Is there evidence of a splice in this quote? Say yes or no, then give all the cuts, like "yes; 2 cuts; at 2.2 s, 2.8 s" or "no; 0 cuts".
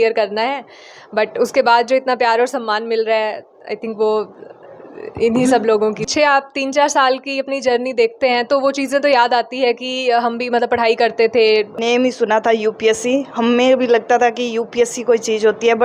yes; 2 cuts; at 6.0 s, 11.8 s